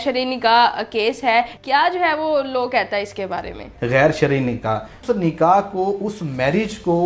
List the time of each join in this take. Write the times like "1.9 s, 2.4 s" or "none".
1.6 s, 3.7 s, 4.9 s